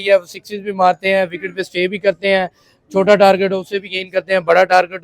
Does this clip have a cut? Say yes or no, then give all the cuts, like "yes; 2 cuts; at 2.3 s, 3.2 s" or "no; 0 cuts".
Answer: no; 0 cuts